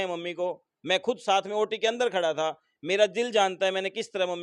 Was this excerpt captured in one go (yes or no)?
yes